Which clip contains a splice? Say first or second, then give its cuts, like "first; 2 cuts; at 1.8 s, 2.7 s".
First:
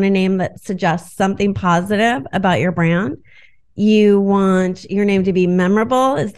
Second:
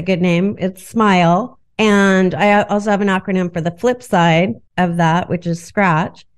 second; 2 cuts; at 1.6 s, 4.6 s